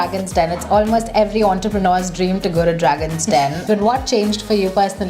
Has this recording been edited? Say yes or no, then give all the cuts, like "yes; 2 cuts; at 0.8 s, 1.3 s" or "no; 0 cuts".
yes; 1 cut; at 3.6 s